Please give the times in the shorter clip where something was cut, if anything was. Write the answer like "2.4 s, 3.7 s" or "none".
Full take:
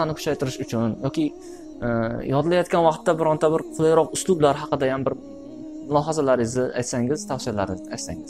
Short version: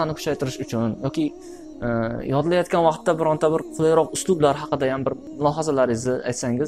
5.3 s